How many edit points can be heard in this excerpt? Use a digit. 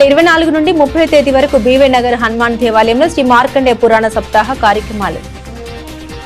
1